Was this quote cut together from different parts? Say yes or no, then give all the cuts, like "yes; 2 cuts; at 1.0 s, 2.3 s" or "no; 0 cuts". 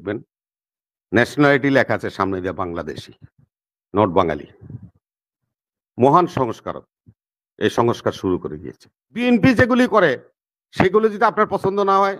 yes; 1 cut; at 9.2 s